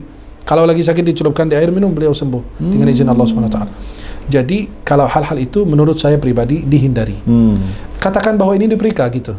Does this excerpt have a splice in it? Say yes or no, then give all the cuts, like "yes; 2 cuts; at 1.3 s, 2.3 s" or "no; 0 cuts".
no; 0 cuts